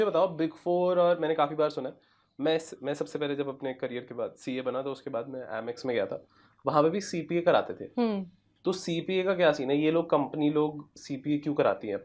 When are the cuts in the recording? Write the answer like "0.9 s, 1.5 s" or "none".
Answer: none

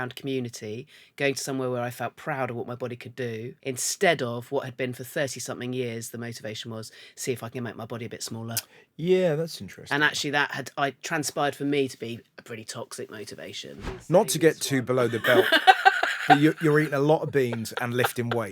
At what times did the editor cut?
3.5 s, 14.0 s

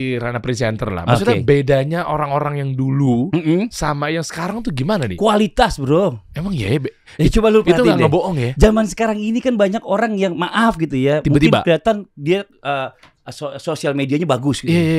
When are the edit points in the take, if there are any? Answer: none

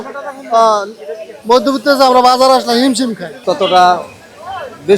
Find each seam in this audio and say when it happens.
3.3 s

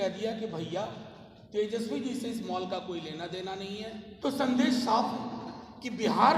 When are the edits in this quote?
4.1 s

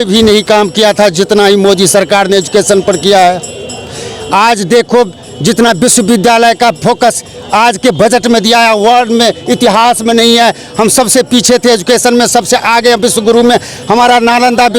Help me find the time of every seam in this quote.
none

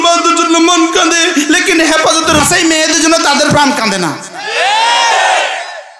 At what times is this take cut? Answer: 2.4 s

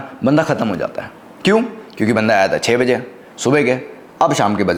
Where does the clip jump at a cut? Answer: none

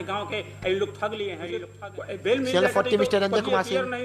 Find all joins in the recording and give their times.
1.3 s

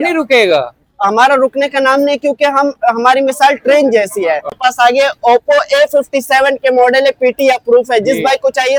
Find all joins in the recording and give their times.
none

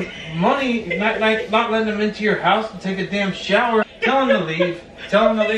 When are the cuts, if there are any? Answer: 3.8 s

